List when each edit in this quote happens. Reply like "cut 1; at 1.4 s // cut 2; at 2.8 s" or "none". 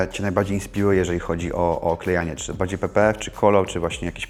none